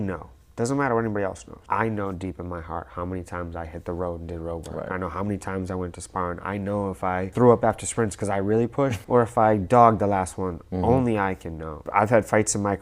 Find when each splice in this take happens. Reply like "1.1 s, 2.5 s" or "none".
1.5 s, 7.3 s, 9.0 s